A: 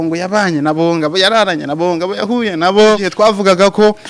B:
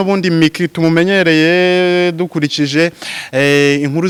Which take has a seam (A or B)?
A